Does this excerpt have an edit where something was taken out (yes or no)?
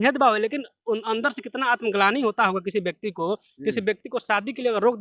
no